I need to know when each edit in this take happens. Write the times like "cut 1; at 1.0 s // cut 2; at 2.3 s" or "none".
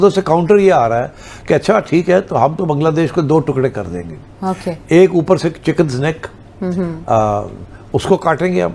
none